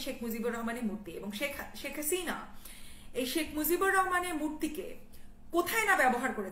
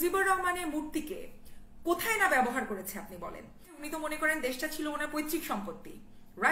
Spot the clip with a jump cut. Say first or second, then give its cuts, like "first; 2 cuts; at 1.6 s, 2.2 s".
second; 1 cut; at 3.8 s